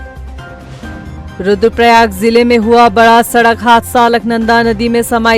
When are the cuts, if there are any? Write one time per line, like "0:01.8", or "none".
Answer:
0:00.9